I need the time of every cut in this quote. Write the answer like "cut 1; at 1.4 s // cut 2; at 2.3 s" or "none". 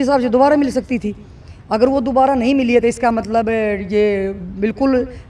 none